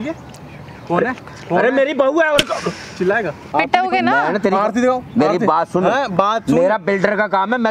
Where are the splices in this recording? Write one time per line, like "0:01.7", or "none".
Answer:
0:03.5